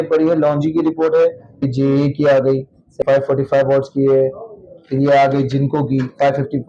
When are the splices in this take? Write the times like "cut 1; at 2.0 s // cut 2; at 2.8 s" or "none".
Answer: cut 1; at 1.7 s // cut 2; at 3.0 s